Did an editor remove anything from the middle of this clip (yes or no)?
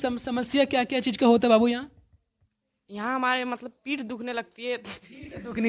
no